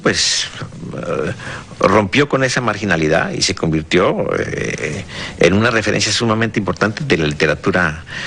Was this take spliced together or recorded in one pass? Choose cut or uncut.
cut